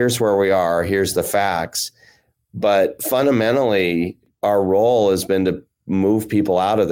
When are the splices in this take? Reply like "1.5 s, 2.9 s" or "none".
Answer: 4.2 s